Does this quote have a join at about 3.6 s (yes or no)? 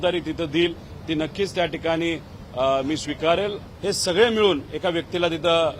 yes